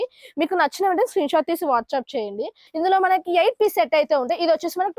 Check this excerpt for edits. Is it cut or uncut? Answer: cut